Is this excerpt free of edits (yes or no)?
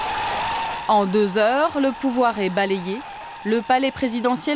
yes